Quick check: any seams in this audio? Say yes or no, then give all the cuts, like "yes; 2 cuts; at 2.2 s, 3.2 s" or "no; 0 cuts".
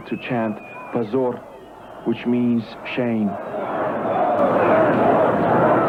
no; 0 cuts